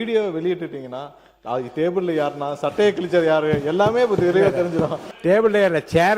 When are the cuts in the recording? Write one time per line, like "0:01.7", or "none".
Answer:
0:05.0